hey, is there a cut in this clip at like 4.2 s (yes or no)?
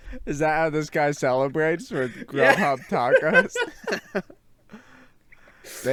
no